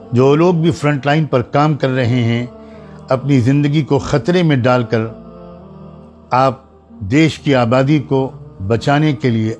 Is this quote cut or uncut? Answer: uncut